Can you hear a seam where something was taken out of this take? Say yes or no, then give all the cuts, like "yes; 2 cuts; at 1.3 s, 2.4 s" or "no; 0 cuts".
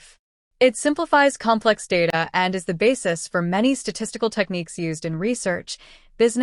yes; 1 cut; at 2.7 s